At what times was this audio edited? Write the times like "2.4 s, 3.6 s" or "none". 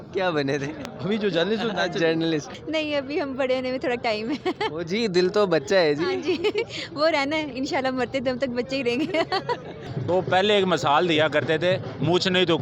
2.6 s, 9.9 s

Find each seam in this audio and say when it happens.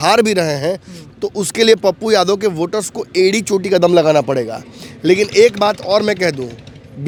none

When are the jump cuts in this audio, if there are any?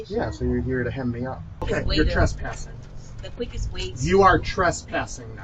1.6 s

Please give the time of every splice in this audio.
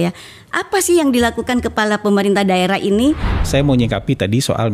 3.3 s

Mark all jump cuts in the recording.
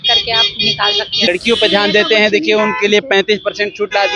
1.3 s

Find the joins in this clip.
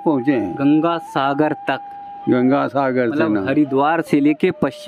none

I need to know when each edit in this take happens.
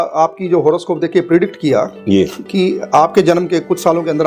none

